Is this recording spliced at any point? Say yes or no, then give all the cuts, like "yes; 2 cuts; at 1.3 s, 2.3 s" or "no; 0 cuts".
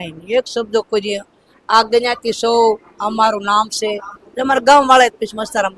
no; 0 cuts